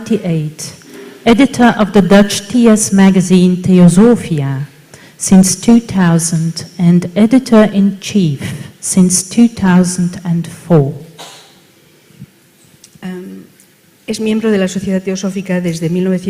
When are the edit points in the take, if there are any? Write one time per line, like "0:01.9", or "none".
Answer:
0:11.8